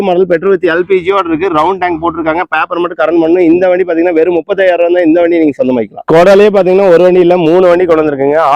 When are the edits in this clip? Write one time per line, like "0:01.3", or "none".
none